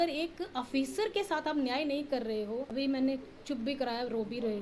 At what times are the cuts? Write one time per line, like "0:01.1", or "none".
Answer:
0:02.7